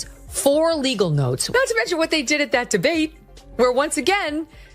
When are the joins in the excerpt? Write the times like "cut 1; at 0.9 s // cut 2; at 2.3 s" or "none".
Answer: cut 1; at 1.4 s